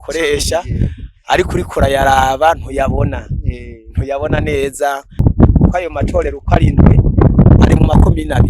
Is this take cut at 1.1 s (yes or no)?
no